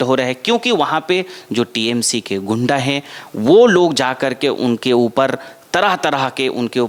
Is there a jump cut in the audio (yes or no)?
no